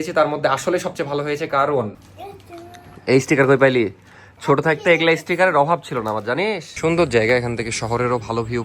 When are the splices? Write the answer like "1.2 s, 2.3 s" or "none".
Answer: 2.0 s, 6.7 s

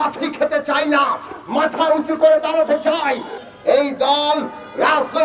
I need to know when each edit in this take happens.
3.4 s

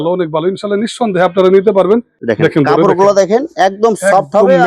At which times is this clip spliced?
2.2 s

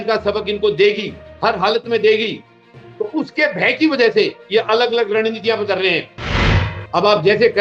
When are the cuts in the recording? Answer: 6.4 s

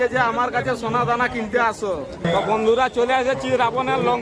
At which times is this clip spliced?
2.3 s

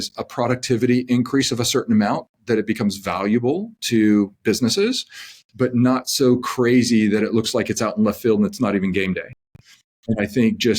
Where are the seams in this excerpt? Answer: none

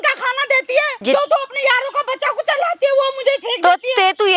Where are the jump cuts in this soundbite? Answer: 0.9 s

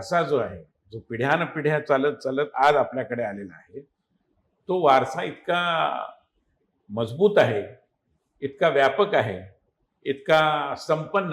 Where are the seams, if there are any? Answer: none

